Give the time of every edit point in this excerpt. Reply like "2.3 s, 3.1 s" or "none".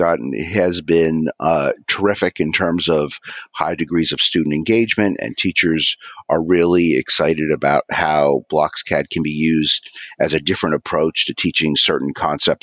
none